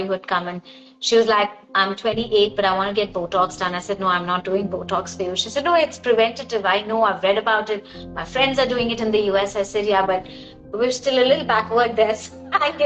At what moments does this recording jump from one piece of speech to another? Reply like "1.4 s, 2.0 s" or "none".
none